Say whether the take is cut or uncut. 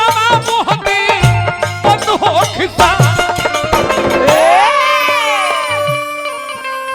uncut